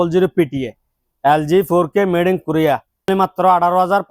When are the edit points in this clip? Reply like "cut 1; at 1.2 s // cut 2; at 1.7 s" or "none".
cut 1; at 3.1 s